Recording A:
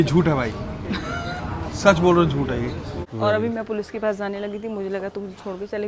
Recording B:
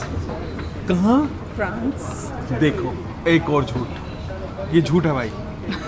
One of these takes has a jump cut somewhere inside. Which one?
A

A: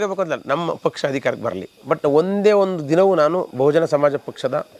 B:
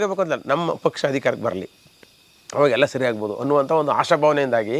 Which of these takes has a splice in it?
A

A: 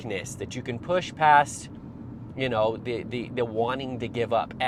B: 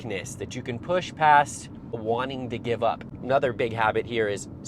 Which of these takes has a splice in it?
B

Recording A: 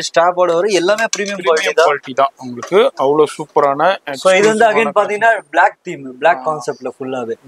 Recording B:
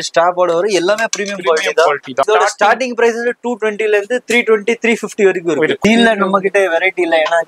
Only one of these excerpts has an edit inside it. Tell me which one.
B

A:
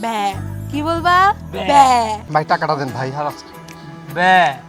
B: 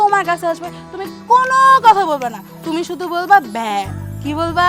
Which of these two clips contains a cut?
A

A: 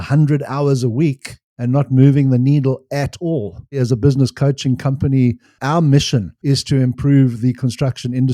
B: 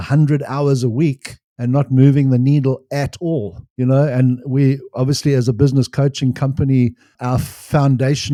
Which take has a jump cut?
A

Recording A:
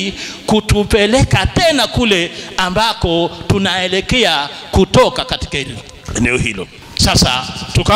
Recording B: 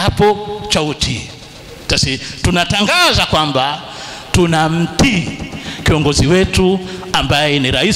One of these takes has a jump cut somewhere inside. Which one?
A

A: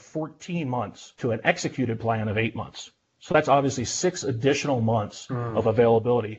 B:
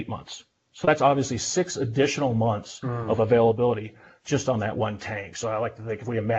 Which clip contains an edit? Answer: A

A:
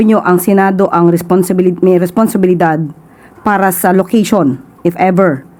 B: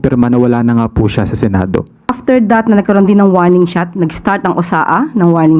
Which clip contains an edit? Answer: B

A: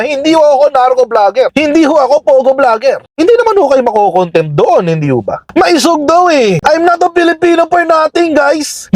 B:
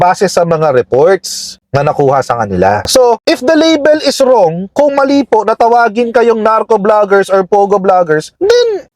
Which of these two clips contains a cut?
A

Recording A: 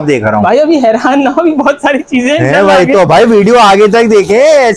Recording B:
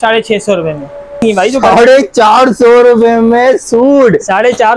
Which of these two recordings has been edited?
B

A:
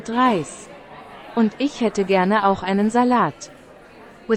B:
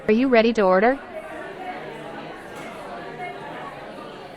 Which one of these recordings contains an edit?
B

